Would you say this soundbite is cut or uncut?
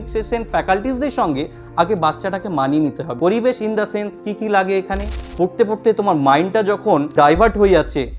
cut